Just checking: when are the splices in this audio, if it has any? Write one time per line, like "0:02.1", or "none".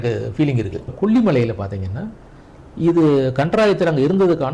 0:00.9